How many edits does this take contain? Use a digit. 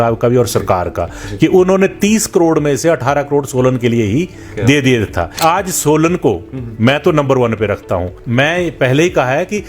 2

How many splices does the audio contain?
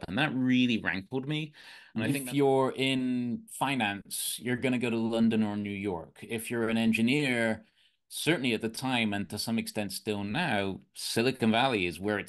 1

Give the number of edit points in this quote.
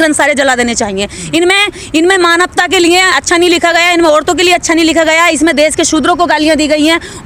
0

